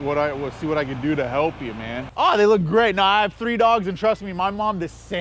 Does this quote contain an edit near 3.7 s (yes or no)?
no